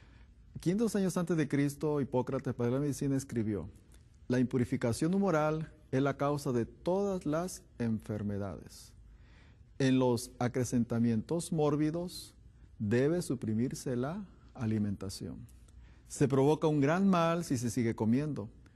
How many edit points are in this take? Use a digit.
1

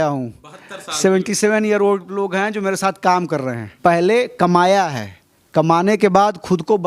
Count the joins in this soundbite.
1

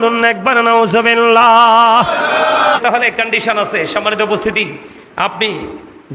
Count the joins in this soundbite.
1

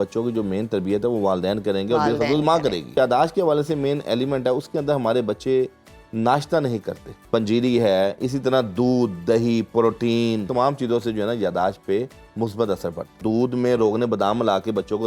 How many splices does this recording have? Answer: 4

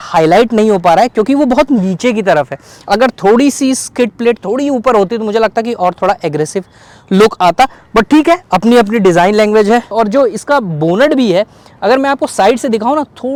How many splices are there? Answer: 0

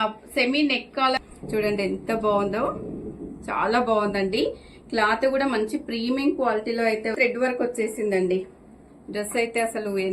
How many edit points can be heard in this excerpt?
2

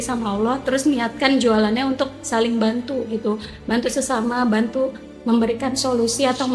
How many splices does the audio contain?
0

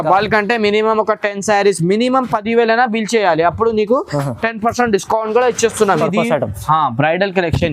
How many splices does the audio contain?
1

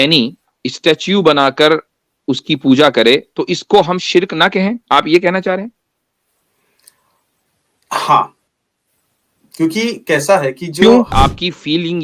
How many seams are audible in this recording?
1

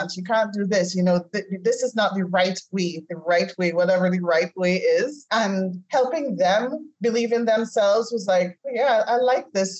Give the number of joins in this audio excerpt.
2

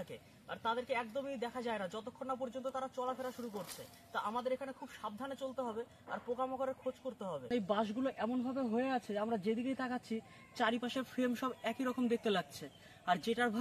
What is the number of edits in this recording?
1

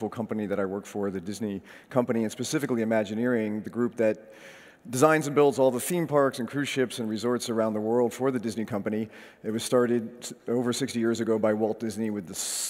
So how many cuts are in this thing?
0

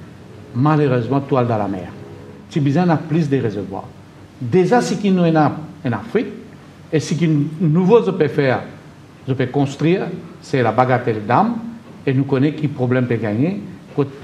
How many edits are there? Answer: 1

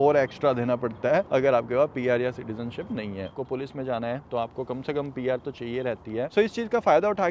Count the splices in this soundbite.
2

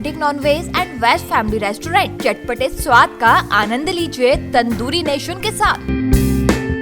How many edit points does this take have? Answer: 0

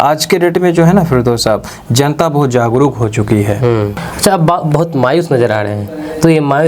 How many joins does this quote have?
1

